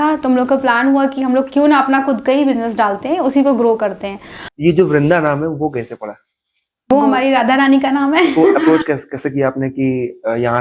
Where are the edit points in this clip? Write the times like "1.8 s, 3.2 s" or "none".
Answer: 4.4 s, 8.6 s